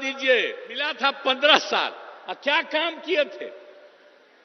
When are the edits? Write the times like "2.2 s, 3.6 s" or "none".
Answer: 0.9 s